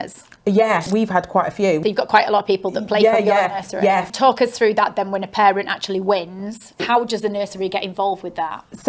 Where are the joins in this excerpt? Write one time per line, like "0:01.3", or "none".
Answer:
0:00.9
0:01.8
0:04.1
0:06.8

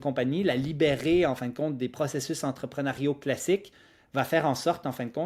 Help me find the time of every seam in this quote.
none

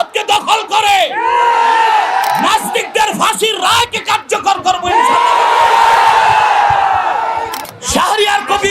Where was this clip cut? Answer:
0:07.5

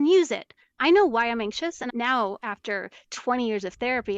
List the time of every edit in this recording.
0:00.8
0:01.9

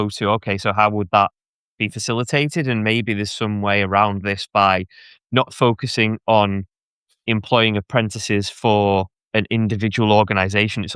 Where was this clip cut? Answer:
none

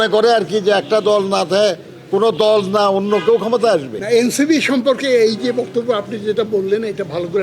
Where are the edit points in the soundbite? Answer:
0:03.9

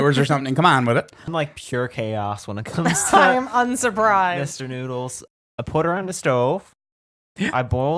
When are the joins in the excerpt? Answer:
0:01.3
0:05.2

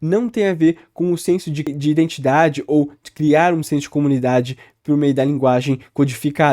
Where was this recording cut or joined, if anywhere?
0:01.6

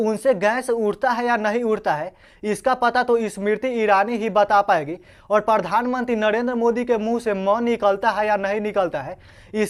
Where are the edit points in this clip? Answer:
none

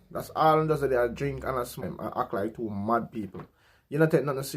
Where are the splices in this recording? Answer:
0:01.8

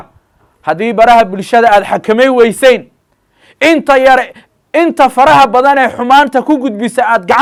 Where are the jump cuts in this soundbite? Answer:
none

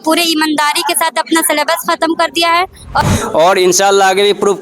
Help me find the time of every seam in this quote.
0:03.0

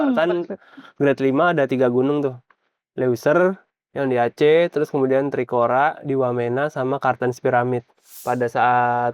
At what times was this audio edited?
0:08.1

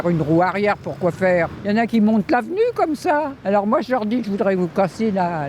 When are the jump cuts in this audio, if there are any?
0:01.8
0:03.4

